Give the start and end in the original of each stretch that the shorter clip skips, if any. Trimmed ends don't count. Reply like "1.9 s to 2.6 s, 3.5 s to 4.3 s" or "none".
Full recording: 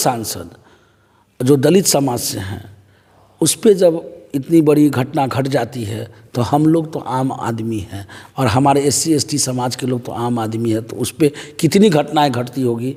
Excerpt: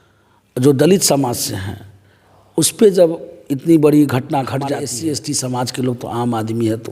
5.7 s to 8.9 s